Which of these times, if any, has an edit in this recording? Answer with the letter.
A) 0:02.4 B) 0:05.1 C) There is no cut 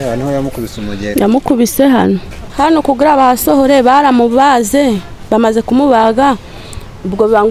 A